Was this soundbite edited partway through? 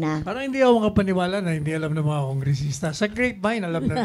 no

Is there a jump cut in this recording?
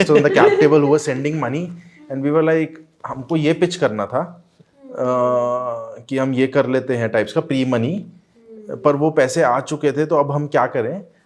no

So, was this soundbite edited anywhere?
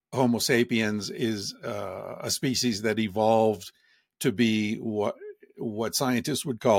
no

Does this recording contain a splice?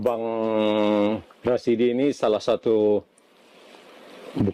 yes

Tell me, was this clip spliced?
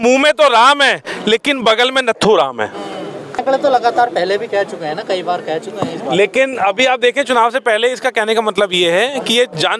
no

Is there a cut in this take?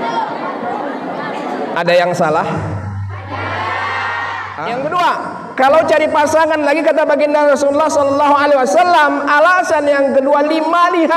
yes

